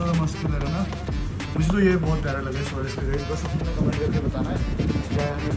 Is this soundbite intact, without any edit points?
yes; 0 cuts

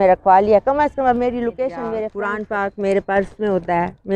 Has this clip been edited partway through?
yes; 1 cut; at 2.2 s

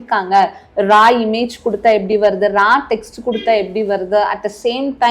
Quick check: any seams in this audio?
no; 0 cuts

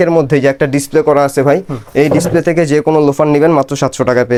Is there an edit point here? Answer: no; 0 cuts

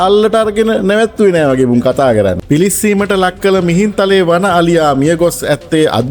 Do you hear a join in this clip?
yes; 1 cut; at 2.4 s

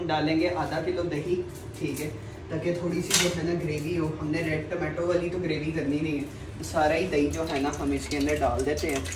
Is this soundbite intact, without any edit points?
yes; 0 cuts

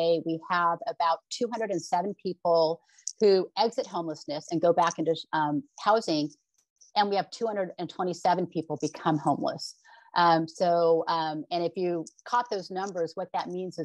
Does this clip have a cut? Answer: no; 0 cuts

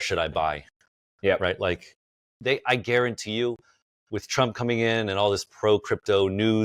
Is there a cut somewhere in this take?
yes; 1 cut; at 2.4 s

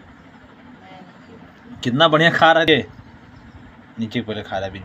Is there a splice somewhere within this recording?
yes; 1 cut; at 2.7 s

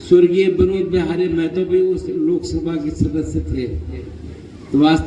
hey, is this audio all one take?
yes; 0 cuts

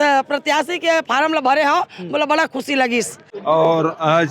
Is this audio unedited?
no; 1 cut; at 3.2 s

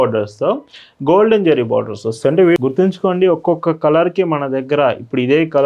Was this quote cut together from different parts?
yes; 1 cut; at 2.6 s

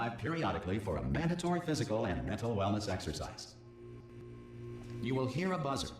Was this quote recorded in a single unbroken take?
no; 1 cut; at 4.7 s

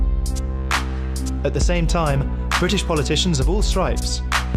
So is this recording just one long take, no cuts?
no; 1 cut; at 3.5 s

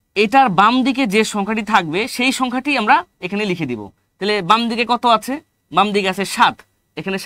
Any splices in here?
no; 0 cuts

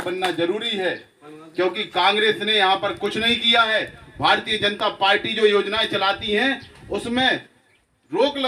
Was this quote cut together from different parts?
no; 0 cuts

